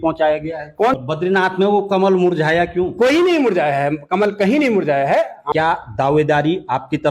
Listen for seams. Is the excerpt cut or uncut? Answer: cut